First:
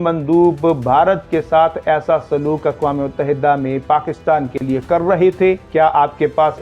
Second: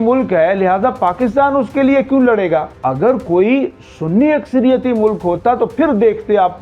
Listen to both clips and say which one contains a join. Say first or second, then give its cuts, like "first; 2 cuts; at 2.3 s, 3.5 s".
second; 1 cut; at 2.7 s